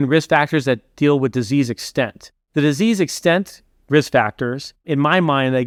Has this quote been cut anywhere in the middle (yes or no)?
no